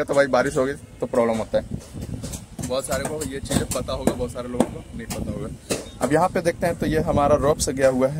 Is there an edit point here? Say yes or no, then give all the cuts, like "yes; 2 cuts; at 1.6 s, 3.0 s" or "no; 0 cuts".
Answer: no; 0 cuts